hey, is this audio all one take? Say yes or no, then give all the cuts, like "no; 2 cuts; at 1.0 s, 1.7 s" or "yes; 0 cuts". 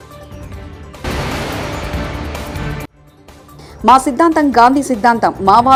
yes; 0 cuts